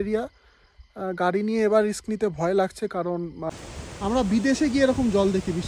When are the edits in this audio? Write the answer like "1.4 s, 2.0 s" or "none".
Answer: 3.6 s

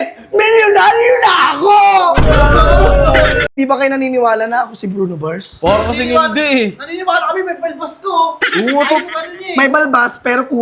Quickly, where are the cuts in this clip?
3.5 s

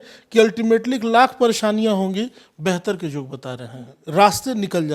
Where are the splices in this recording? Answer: 4.0 s

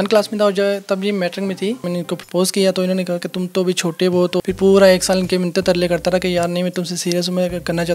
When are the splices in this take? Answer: 1.9 s, 4.4 s

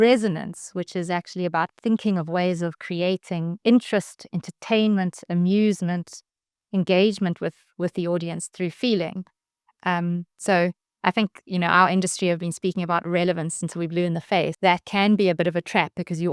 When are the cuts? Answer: 14.5 s

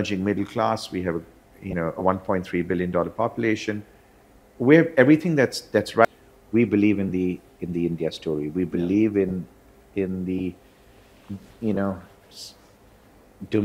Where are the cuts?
6.1 s

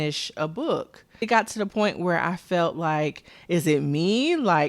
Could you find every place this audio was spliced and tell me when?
1.2 s

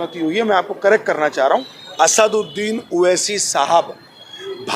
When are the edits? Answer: 1.8 s

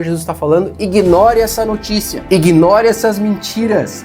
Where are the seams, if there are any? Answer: 2.1 s

